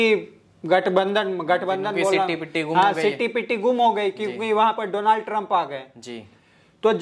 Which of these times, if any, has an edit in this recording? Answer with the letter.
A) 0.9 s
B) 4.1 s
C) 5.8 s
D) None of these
D